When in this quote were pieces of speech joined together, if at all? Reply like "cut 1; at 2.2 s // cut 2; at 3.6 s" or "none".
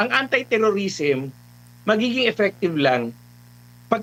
none